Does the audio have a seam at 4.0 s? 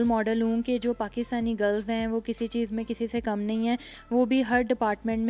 no; 0 cuts

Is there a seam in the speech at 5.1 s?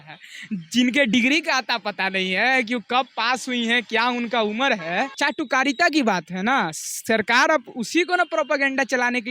yes; 1 cut; at 5.1 s

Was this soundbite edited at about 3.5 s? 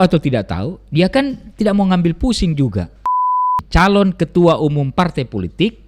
yes; 1 cut; at 3.5 s

